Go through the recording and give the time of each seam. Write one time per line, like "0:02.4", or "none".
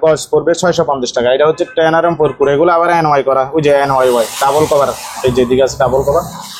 none